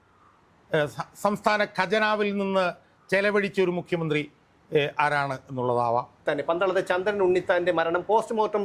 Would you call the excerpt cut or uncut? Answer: cut